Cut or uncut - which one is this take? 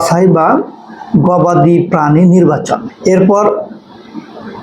cut